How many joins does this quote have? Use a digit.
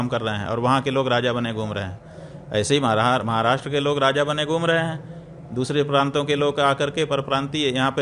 0